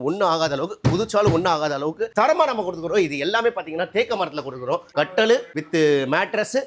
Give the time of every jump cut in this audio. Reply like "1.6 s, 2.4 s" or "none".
4.9 s